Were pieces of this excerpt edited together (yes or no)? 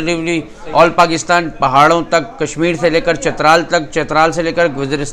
no